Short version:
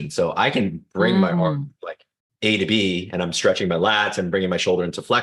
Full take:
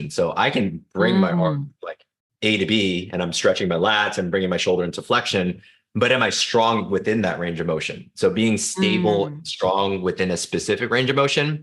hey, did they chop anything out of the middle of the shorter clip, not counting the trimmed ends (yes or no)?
no